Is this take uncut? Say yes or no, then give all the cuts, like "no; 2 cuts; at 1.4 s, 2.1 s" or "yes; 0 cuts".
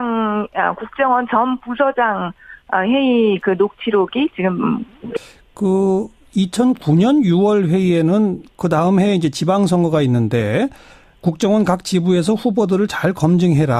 yes; 0 cuts